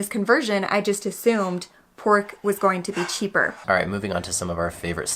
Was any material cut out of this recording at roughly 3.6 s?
yes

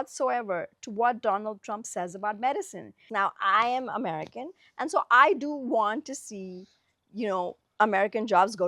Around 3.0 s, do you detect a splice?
yes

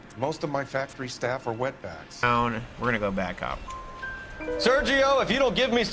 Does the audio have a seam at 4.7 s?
no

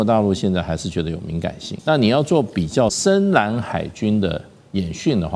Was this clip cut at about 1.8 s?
yes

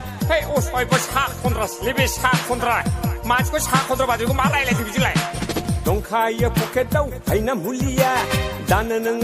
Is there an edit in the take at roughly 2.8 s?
no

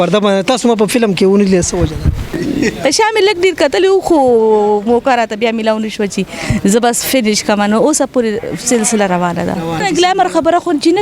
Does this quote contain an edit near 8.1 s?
no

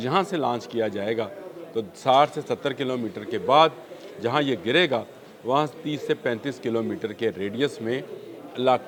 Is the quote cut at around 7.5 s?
no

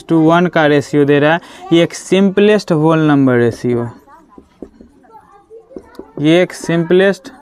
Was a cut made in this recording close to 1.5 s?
no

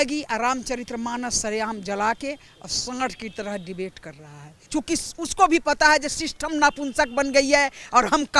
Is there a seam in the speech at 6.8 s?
no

